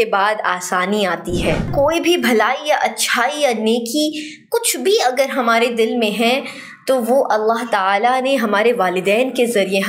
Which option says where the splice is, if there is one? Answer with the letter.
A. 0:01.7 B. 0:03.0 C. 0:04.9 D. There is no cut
A